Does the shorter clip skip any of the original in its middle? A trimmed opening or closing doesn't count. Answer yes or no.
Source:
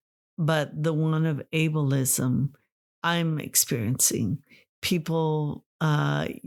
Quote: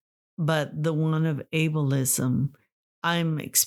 no